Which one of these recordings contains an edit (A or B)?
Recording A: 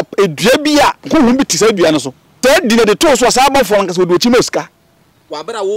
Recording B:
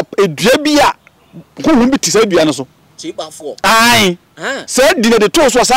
A